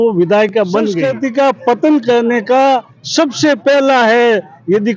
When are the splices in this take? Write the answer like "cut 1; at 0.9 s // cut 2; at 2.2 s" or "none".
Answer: cut 1; at 1.0 s

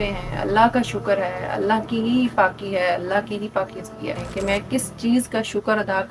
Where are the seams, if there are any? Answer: cut 1; at 4.3 s

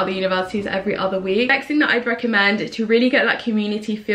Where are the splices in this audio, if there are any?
cut 1; at 1.5 s

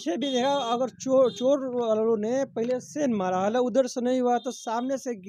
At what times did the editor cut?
none

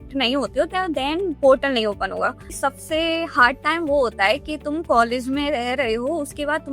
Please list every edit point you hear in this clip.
cut 1; at 2.5 s

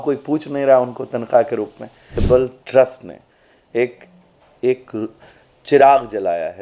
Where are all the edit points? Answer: cut 1; at 2.2 s

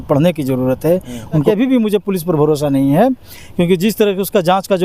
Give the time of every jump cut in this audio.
cut 1; at 1.4 s

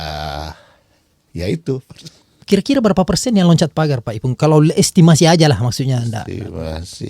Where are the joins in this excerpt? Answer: cut 1; at 1.9 s

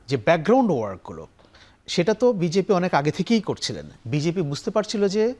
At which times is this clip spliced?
cut 1; at 3.8 s

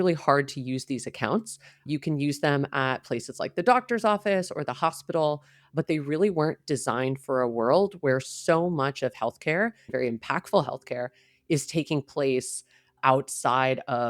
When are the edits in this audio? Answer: cut 1; at 9.9 s

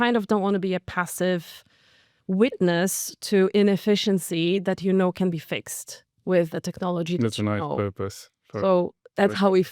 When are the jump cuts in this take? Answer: none

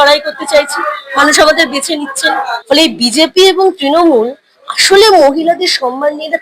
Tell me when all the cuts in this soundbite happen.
cut 1; at 2.6 s

